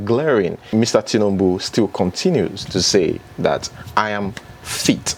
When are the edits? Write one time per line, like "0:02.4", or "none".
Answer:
none